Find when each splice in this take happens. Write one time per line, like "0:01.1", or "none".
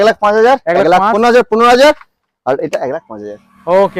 none